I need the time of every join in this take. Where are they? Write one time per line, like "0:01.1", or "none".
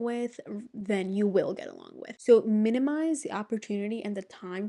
0:02.1